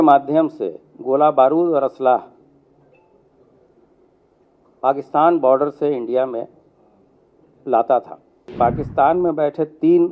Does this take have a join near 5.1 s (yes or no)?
no